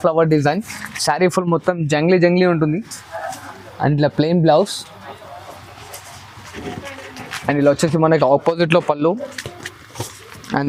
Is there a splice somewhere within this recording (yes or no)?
no